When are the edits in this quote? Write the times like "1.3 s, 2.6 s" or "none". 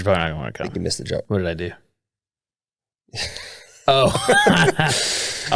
1.2 s